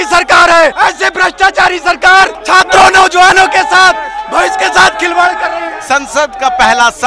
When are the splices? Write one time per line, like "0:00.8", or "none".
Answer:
0:00.7
0:02.4
0:05.7